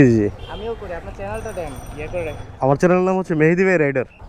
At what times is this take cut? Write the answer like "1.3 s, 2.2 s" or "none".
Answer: none